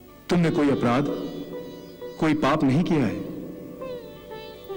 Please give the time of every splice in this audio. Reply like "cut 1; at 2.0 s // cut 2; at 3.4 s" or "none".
none